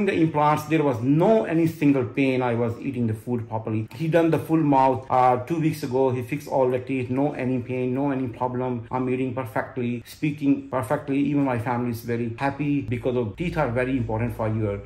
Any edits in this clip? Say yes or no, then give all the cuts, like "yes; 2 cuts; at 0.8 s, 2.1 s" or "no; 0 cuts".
no; 0 cuts